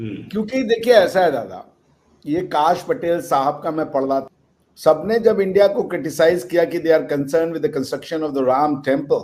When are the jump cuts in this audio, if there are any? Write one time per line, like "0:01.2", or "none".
0:04.2